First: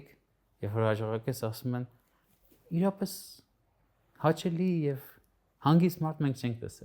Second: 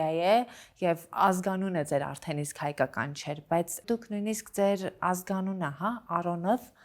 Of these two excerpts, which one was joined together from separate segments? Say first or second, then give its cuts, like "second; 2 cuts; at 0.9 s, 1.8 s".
second; 1 cut; at 3.8 s